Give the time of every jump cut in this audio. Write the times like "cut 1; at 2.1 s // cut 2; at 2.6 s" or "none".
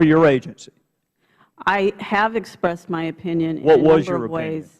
cut 1; at 2.8 s